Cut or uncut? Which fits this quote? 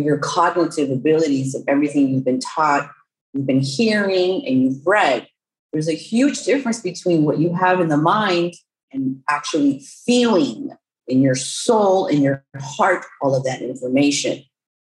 cut